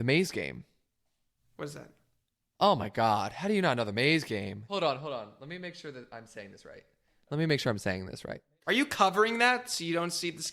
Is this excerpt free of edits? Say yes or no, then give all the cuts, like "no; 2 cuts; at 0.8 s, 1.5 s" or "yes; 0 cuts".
no; 2 cuts; at 4.7 s, 8.4 s